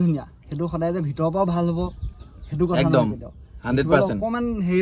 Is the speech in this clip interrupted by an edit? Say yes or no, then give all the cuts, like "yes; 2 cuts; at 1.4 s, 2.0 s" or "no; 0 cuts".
no; 0 cuts